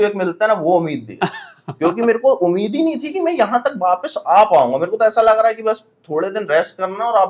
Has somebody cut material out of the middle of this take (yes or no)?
no